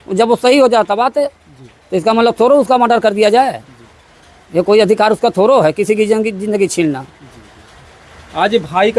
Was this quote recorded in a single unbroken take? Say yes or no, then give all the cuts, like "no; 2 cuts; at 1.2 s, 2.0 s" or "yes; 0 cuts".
yes; 0 cuts